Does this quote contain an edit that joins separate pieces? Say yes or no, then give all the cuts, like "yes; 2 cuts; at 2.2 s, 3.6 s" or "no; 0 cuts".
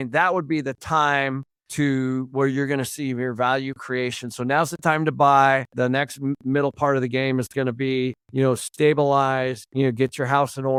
no; 0 cuts